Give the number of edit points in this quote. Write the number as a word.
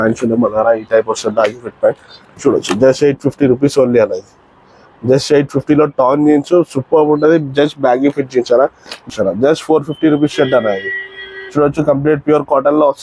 one